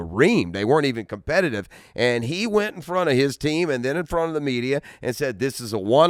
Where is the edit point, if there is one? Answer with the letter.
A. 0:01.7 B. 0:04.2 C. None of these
C